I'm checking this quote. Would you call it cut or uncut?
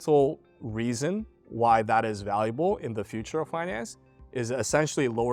uncut